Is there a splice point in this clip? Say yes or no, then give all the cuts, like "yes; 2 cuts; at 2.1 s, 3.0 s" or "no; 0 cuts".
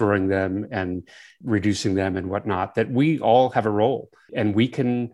yes; 2 cuts; at 1.3 s, 4.3 s